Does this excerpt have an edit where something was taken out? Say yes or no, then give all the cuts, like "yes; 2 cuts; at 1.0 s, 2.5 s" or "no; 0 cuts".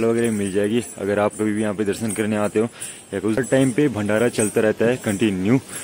yes; 1 cut; at 3.4 s